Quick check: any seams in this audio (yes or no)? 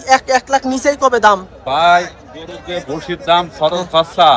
no